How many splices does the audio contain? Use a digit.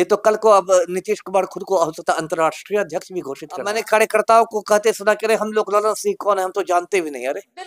1